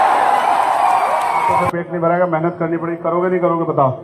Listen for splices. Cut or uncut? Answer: cut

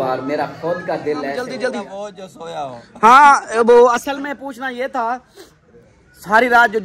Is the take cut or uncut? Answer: cut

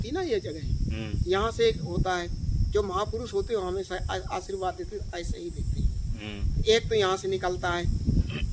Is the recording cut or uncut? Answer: uncut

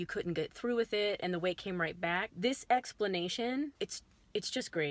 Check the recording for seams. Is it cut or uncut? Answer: cut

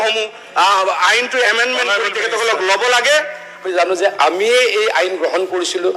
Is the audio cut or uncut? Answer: cut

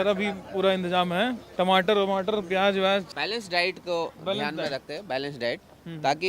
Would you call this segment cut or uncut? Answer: cut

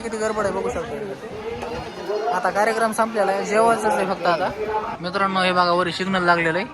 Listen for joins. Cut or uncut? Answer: cut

